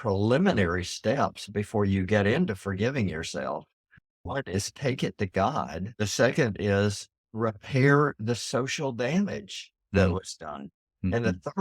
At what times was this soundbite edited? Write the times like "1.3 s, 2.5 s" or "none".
5.8 s